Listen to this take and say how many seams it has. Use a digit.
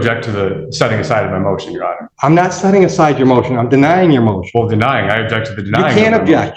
1